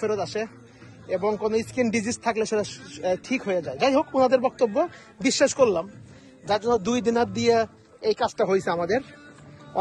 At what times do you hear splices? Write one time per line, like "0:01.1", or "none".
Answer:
none